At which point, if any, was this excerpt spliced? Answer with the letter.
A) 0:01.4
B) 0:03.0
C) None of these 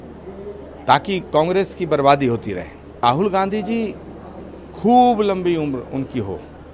B